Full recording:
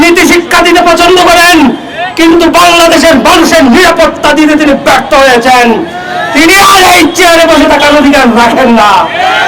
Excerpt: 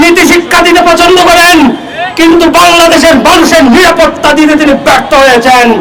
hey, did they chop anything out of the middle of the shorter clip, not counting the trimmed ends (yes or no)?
no